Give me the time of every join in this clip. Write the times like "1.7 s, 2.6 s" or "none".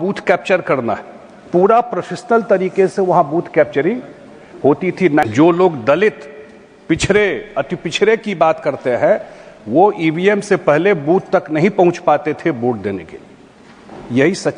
5.2 s